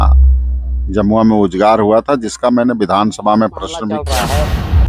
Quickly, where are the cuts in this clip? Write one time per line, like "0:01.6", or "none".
0:04.0